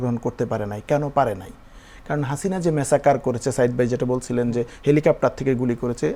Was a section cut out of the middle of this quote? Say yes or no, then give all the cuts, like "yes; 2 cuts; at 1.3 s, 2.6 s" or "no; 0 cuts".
no; 0 cuts